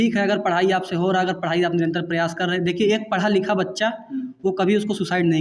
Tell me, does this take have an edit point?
no; 0 cuts

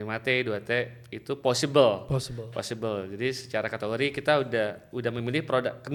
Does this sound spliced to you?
no; 0 cuts

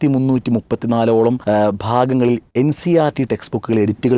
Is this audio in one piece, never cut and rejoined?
no; 2 cuts; at 1.4 s, 2.5 s

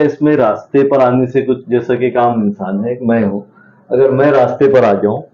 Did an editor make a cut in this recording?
no; 0 cuts

